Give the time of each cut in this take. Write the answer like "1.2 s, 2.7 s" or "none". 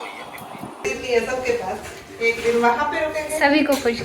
1.0 s